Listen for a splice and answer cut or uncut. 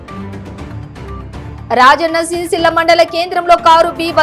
cut